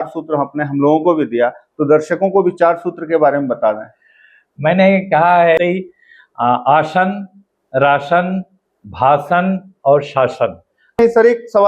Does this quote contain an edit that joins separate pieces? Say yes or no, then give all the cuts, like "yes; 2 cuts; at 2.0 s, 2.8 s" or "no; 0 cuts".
yes; 2 cuts; at 5.6 s, 11.0 s